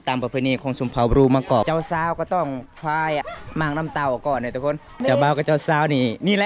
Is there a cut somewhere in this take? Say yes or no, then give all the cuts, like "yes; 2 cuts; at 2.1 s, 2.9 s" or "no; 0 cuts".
yes; 3 cuts; at 1.6 s, 3.3 s, 4.9 s